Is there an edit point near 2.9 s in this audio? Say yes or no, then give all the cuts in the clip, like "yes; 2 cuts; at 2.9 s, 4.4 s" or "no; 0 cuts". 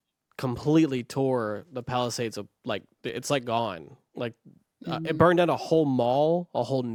no; 0 cuts